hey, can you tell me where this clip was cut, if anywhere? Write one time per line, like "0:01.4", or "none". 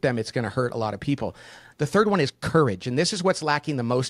0:01.6